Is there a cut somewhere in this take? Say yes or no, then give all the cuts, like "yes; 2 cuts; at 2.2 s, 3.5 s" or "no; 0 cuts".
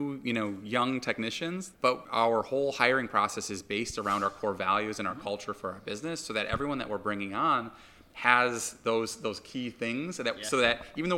yes; 1 cut; at 1.8 s